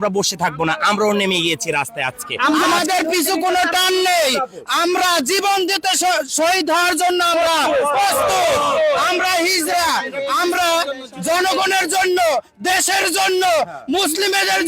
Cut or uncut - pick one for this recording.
cut